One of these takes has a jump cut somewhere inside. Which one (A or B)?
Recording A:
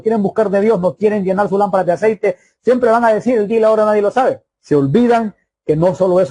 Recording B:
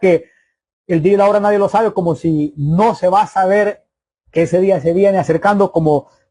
A